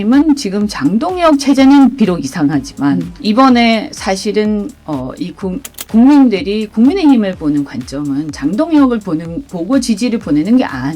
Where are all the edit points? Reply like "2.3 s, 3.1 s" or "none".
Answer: 3.1 s